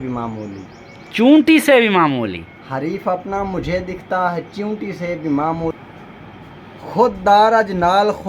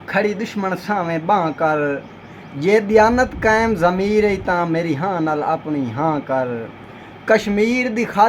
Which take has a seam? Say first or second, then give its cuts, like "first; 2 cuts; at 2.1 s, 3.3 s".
first; 1 cut; at 5.7 s